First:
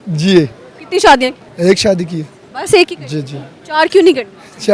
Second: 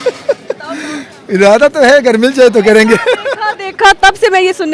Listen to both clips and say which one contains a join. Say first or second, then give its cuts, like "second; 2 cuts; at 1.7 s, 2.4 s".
first; 1 cut; at 1.4 s